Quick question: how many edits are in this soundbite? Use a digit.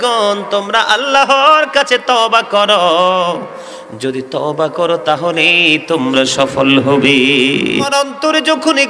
1